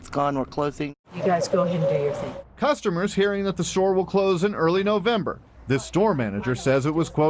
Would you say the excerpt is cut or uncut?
cut